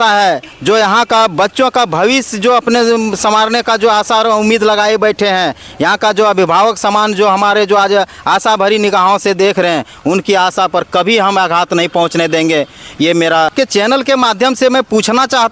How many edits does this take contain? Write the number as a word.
one